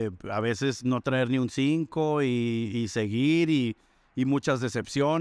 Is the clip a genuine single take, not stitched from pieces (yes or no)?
yes